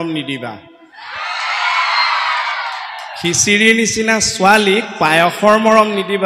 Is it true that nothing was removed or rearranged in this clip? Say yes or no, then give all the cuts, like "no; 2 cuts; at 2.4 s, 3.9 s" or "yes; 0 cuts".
yes; 0 cuts